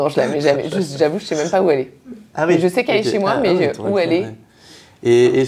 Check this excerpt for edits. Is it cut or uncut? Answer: uncut